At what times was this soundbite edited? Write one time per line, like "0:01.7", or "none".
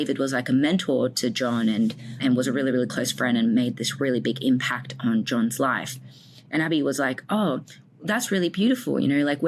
0:02.2